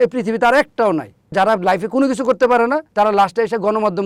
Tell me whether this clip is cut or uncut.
cut